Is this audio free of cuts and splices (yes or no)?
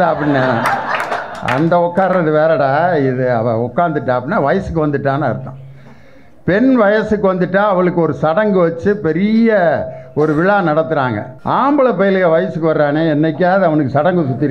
no